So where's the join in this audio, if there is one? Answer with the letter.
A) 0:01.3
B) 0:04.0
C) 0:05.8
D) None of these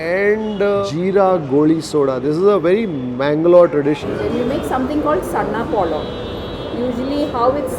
B